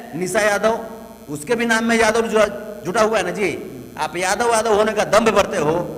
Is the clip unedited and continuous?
yes; 0 cuts

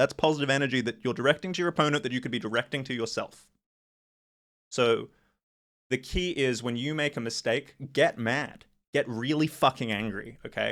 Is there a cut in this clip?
no; 0 cuts

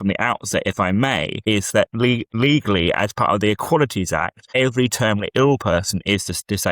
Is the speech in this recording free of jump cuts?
no; 3 cuts; at 1.3 s, 2.4 s, 4.4 s

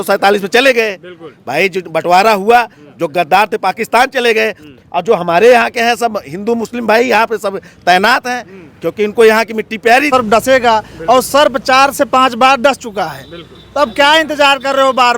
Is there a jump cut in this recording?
yes; 1 cut; at 10.1 s

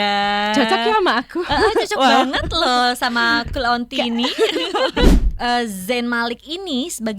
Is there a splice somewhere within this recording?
yes; 1 cut; at 5.1 s

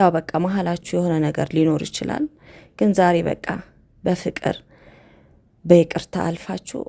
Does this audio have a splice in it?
no; 0 cuts

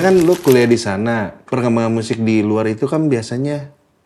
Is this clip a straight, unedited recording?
yes; 0 cuts

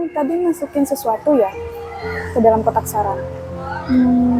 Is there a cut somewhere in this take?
no; 0 cuts

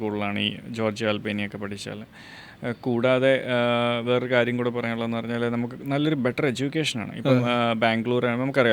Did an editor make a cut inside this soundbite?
no; 0 cuts

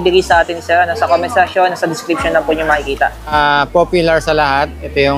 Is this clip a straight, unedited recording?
no; 1 cut; at 3.3 s

